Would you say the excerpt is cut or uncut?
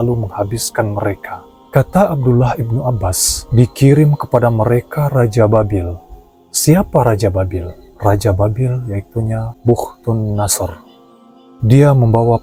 uncut